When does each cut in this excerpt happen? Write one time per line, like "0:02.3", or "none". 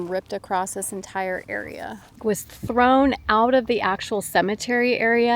0:02.1